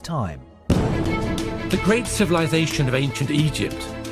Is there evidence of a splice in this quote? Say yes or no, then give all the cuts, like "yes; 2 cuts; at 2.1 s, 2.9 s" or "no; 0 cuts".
no; 0 cuts